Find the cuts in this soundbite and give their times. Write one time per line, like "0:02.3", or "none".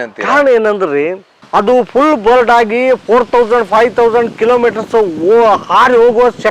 0:01.4